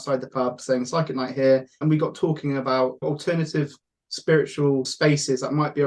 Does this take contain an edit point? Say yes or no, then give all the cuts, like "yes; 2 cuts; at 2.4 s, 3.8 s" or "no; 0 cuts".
yes; 3 cuts; at 1.7 s, 3.0 s, 4.9 s